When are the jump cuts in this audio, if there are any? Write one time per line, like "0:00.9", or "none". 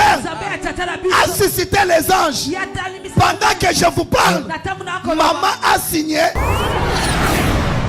0:06.4